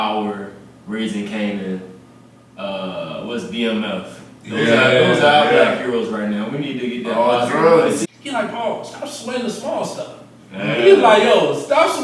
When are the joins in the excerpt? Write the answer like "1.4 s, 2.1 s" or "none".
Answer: 8.1 s